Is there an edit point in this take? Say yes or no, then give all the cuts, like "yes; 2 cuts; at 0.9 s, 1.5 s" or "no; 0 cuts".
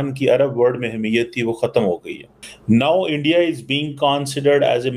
no; 0 cuts